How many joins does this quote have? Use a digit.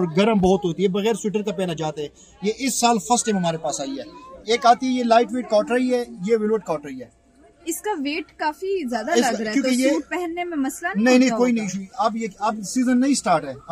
0